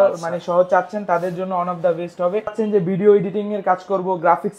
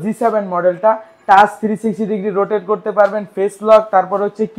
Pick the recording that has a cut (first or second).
first